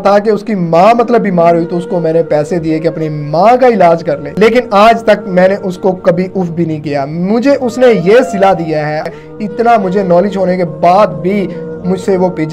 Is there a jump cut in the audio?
yes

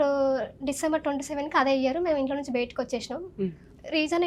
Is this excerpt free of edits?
yes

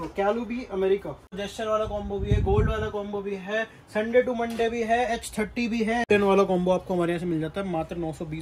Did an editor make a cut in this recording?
yes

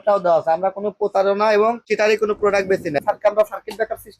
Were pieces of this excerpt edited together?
yes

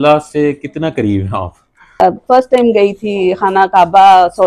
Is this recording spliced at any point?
yes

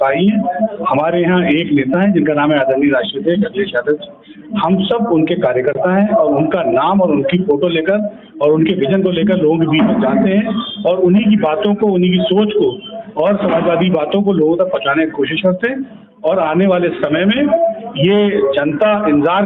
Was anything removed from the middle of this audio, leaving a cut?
no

